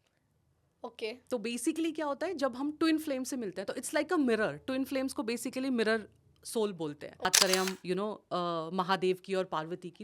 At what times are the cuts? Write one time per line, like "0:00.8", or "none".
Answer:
0:07.3

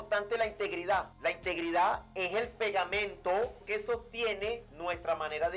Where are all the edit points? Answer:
0:01.1
0:03.6
0:04.7

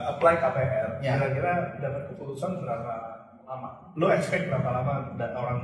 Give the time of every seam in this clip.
none

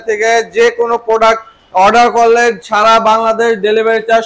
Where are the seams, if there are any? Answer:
none

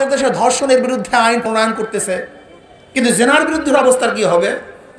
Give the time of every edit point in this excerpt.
0:01.4

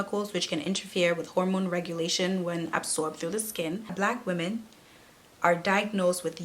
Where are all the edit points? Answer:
0:03.9

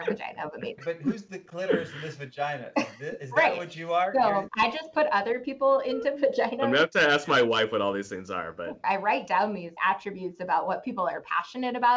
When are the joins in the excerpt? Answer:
0:04.5
0:08.8

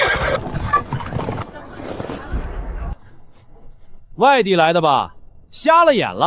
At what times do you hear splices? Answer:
0:01.5

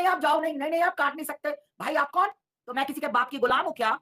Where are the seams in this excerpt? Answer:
0:02.6

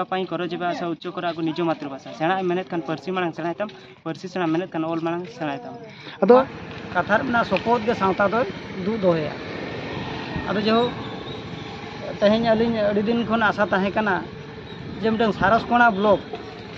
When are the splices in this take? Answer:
0:06.4

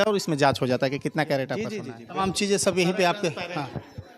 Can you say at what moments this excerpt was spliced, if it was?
0:01.8

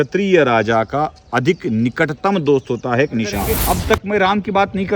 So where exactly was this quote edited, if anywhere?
0:03.5

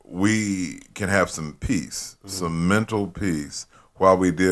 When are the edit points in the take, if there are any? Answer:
none

